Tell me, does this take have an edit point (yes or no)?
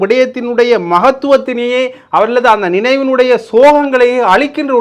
no